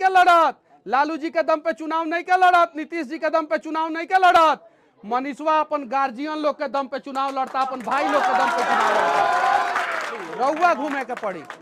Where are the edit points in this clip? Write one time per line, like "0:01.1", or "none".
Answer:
0:10.2